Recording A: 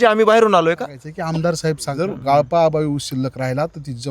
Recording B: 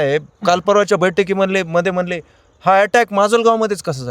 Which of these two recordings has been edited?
A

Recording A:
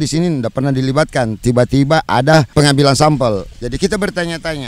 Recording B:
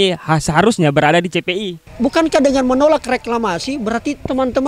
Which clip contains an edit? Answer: B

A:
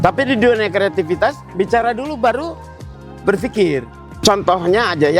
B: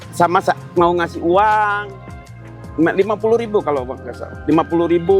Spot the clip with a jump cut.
A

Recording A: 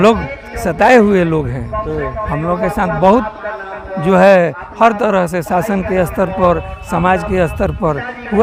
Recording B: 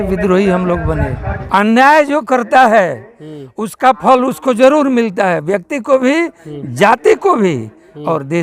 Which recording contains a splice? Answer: B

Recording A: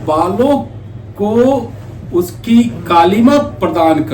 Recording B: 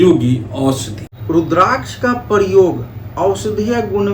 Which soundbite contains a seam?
B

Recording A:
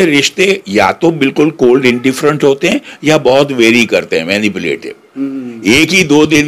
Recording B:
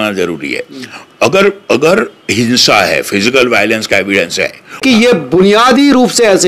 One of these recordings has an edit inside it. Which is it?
B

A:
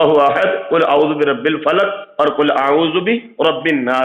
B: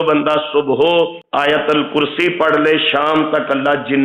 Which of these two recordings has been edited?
B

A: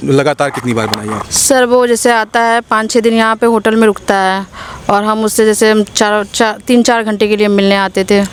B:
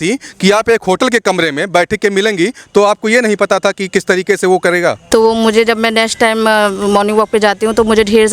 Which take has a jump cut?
B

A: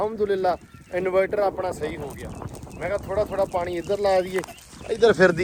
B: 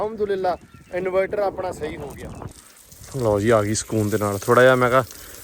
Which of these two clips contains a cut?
B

